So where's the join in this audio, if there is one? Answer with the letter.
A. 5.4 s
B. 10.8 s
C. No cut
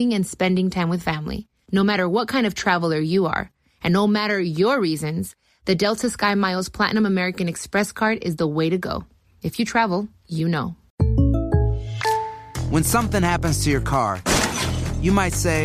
B